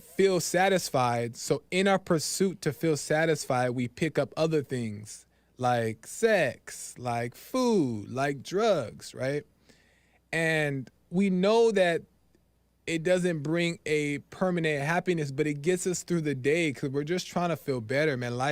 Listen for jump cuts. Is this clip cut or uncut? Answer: uncut